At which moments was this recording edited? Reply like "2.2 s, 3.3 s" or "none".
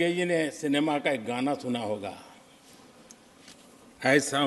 none